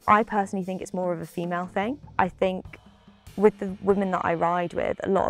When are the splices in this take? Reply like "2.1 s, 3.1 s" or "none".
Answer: none